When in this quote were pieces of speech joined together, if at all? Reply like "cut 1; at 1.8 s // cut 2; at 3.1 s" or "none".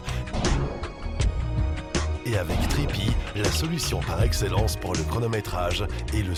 none